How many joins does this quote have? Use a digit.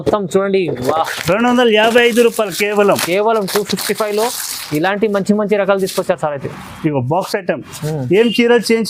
0